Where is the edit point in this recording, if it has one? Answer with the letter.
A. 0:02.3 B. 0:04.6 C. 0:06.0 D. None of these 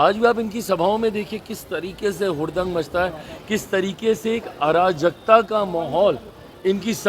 D